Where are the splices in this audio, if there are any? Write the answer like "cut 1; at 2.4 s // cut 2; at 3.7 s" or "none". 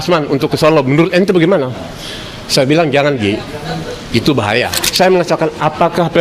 cut 1; at 4.8 s